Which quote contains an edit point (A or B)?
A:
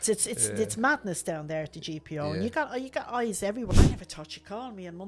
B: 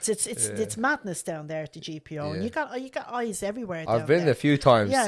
A